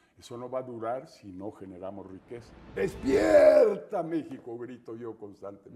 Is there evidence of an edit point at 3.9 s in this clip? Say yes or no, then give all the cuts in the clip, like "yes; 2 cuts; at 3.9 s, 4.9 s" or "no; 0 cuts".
no; 1 cut; at 2.6 s